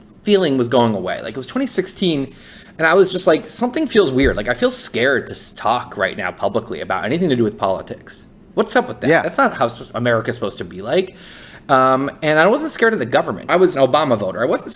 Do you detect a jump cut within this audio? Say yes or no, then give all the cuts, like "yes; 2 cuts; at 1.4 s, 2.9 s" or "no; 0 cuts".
yes; 1 cut; at 13.7 s